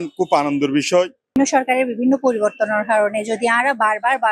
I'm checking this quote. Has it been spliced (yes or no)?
yes